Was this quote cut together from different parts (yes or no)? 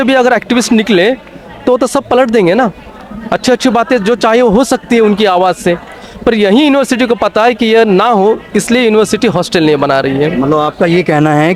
no